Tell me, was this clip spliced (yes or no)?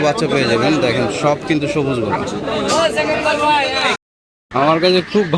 yes